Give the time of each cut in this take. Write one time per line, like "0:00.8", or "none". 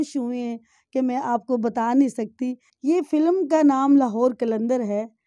0:02.7

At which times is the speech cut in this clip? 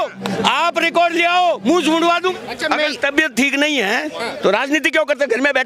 0:02.3

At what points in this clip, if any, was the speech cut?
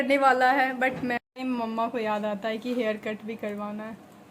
0:01.2

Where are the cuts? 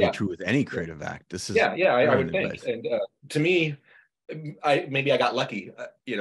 0:03.2

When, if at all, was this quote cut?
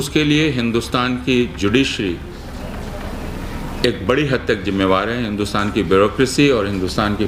none

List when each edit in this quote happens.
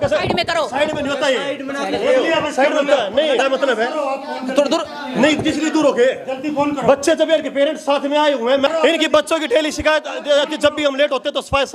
none

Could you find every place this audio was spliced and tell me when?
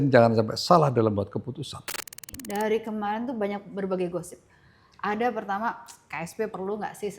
0:02.4

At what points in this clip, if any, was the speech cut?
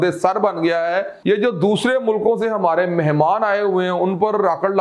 0:01.2

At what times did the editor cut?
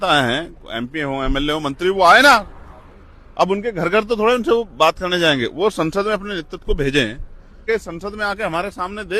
0:07.6

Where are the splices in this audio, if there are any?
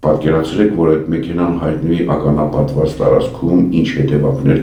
none

